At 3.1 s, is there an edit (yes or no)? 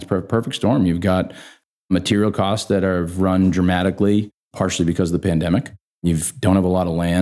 no